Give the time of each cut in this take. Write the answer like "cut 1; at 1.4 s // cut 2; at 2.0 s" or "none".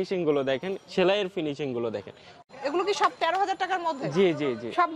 cut 1; at 2.3 s